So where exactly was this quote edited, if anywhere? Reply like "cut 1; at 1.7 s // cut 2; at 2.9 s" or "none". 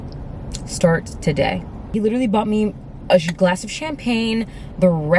cut 1; at 1.8 s